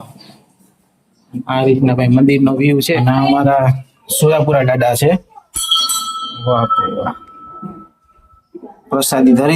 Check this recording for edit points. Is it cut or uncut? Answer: cut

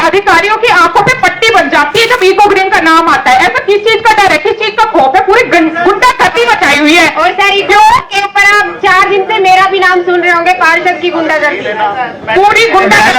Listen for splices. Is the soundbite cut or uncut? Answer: uncut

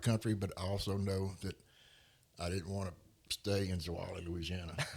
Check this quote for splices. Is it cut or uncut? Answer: uncut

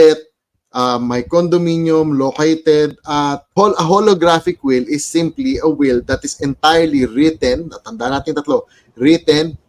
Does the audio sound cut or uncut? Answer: cut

